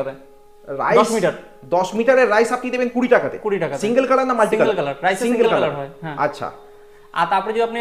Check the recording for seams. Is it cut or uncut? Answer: uncut